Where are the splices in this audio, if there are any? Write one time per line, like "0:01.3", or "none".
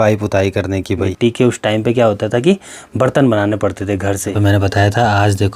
0:01.1
0:04.3